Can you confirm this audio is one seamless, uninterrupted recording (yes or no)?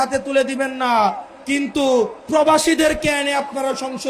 yes